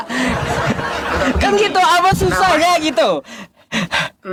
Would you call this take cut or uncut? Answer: uncut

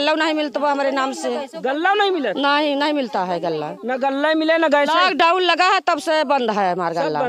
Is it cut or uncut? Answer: uncut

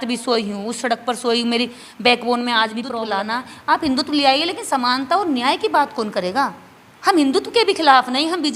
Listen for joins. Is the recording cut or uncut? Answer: cut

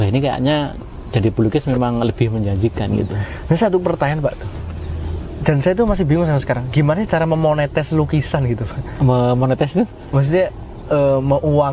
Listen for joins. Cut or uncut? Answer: uncut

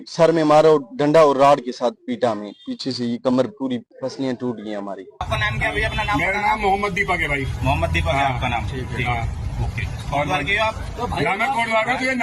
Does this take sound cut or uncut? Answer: cut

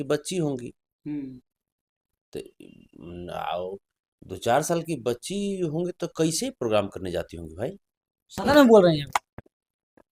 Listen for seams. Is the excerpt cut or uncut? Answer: uncut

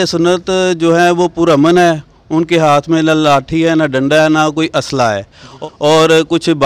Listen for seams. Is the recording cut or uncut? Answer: cut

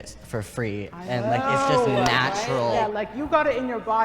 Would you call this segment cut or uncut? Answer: cut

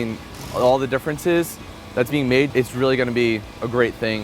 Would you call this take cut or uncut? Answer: cut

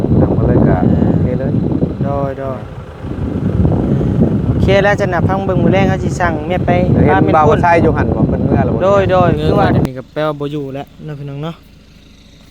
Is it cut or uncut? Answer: cut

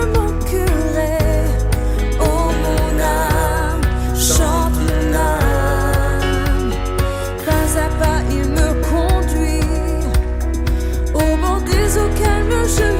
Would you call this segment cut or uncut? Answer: uncut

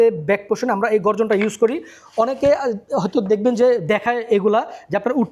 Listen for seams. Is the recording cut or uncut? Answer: uncut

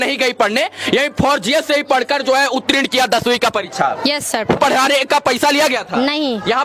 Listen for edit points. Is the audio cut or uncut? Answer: cut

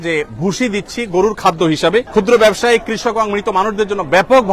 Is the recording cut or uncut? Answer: cut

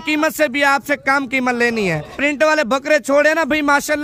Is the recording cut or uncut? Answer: cut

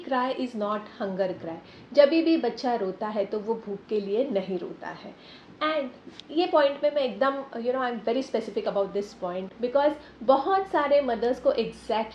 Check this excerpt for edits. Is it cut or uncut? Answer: uncut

